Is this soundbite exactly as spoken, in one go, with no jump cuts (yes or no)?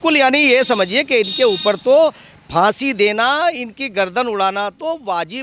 yes